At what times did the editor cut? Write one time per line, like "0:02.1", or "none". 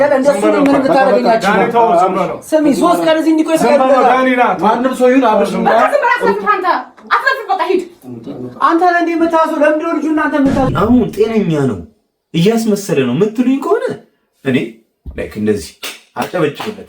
0:10.7